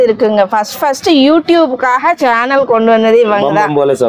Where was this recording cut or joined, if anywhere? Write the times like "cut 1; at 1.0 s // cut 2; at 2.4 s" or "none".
none